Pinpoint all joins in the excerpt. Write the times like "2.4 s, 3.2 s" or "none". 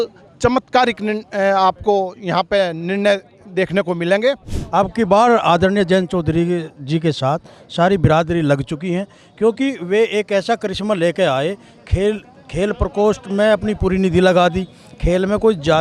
4.5 s